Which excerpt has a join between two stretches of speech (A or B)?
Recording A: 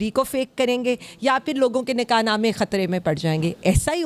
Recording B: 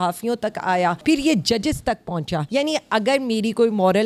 B